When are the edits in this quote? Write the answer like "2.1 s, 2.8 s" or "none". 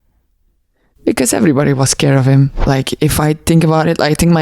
2.6 s